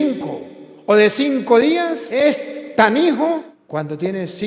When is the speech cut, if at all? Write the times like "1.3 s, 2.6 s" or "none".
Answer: 2.0 s, 3.6 s